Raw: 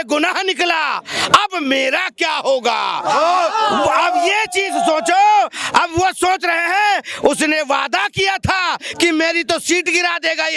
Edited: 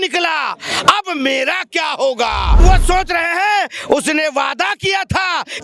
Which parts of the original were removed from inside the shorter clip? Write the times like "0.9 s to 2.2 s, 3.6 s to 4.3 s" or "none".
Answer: 3.0 s to 5.9 s